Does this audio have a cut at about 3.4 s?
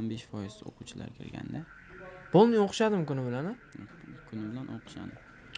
no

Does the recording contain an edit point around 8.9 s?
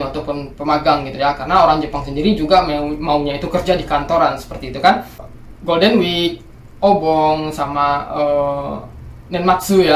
no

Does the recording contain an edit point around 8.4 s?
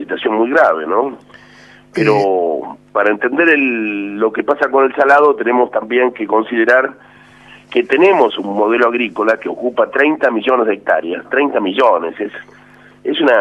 yes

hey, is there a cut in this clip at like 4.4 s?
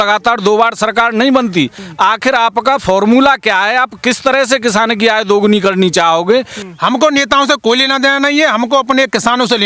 no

